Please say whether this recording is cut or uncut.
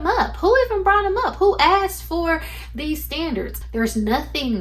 cut